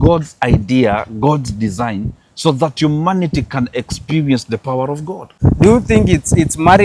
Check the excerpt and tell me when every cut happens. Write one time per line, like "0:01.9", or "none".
0:05.3